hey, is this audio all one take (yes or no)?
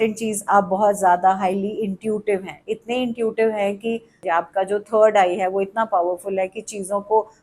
no